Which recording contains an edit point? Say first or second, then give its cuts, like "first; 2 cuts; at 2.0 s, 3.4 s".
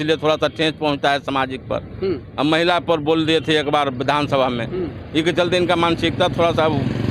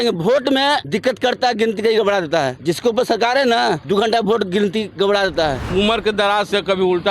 second; 4 cuts; at 0.8 s, 2.5 s, 3.8 s, 5.6 s